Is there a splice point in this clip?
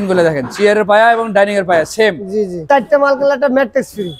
yes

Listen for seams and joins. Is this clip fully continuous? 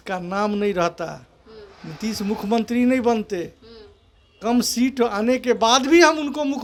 yes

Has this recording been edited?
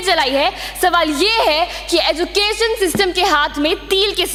no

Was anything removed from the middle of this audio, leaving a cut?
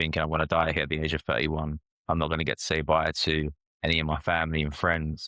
yes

